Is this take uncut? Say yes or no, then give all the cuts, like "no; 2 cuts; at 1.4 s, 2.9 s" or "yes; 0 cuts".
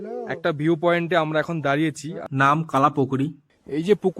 no; 1 cut; at 2.2 s